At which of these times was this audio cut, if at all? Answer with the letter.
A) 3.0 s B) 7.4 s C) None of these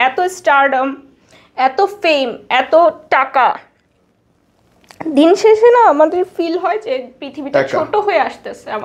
C